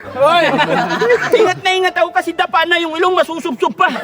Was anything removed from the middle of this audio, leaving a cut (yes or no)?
yes